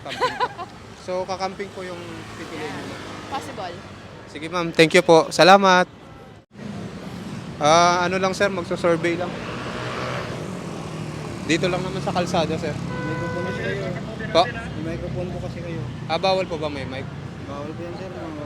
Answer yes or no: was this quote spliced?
yes